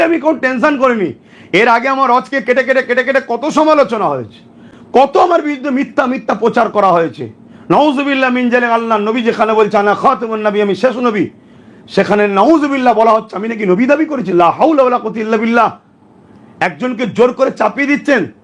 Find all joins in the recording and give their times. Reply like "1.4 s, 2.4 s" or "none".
none